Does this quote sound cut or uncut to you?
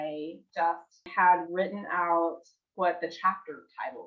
cut